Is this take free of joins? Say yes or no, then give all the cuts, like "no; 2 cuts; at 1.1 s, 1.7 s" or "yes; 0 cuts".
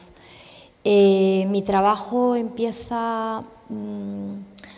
yes; 0 cuts